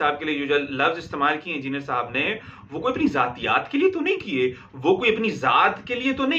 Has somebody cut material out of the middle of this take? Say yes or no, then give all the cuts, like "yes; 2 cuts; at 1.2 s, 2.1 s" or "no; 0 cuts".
no; 0 cuts